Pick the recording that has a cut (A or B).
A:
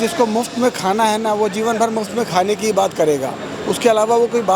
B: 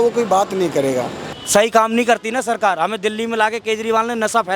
B